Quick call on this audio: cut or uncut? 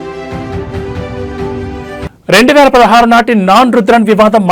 uncut